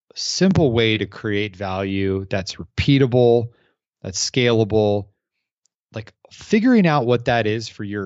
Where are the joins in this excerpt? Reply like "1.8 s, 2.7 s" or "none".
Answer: none

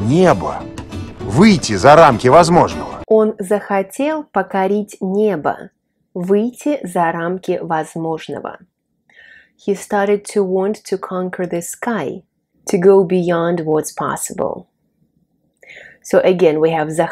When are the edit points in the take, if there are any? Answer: none

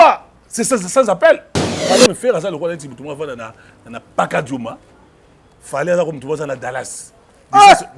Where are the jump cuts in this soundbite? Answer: 1.8 s

